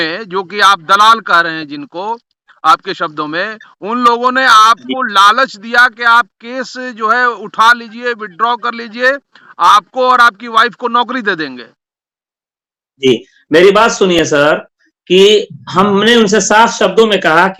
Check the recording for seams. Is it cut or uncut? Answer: uncut